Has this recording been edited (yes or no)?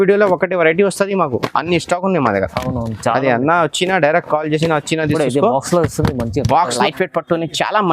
yes